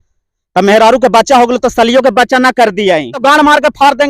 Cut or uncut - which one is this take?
cut